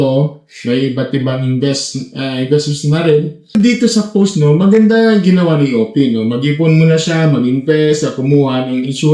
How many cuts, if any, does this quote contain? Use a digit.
1